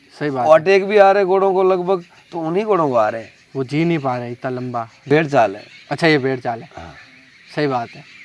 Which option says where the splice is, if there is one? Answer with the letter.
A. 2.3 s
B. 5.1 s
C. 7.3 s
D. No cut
B